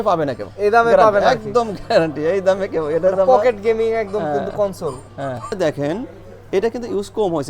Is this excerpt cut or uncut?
cut